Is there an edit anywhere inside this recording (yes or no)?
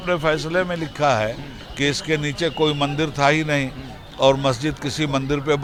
no